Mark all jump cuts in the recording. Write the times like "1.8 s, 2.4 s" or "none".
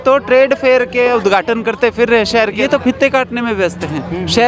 2.6 s

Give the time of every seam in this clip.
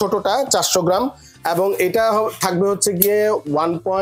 none

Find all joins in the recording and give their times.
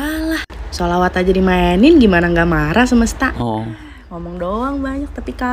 none

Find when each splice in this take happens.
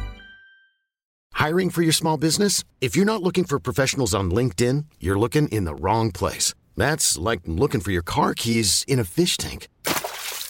none

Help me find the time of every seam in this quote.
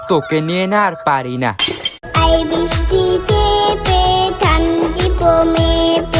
1.9 s

